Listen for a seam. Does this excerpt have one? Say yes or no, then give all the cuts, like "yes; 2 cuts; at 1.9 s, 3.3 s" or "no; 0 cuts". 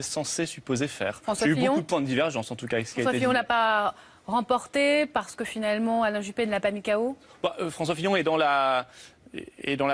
no; 0 cuts